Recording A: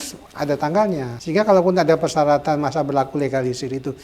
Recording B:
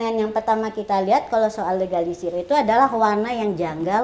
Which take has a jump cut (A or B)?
A